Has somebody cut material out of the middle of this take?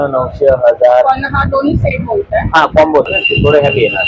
yes; 1 cut; at 3.1 s

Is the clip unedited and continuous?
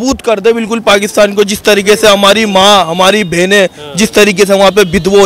yes; 0 cuts

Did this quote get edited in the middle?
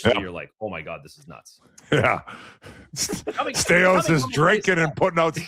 no; 0 cuts

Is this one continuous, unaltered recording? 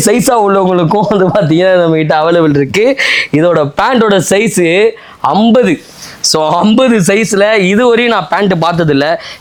yes; 0 cuts

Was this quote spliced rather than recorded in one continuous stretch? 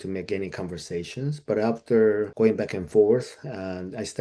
yes; 1 cut; at 2.3 s

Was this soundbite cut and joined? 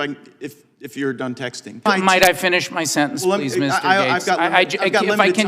yes; 1 cut; at 1.8 s

